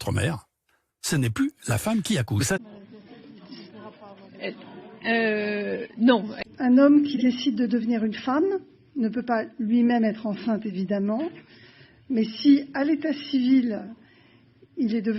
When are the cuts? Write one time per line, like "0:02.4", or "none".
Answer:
0:02.6
0:06.4